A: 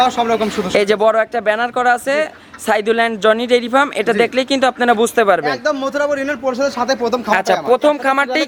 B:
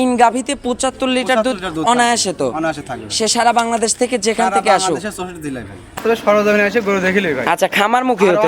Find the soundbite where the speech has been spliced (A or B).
B